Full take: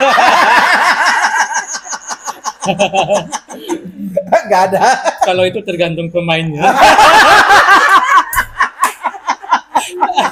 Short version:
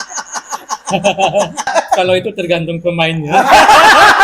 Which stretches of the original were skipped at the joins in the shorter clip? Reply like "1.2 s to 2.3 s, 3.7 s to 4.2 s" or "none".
3.4 s to 5.0 s